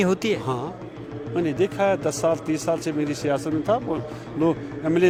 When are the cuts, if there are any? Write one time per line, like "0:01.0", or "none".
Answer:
none

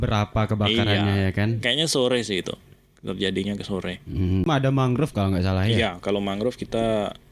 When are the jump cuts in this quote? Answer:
0:04.5

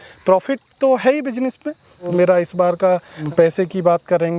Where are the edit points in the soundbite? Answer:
0:02.1
0:03.2

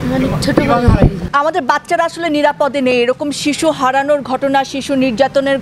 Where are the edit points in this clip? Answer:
0:01.3

